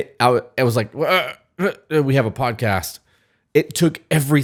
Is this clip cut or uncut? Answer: uncut